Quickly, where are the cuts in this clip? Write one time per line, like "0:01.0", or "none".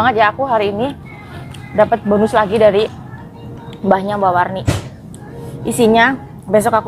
none